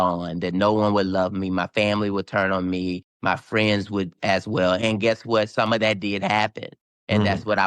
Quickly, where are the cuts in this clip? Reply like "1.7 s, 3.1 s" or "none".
none